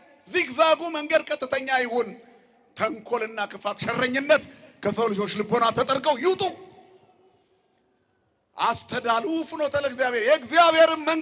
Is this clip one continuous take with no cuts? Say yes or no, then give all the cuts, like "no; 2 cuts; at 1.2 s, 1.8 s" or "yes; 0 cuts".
yes; 0 cuts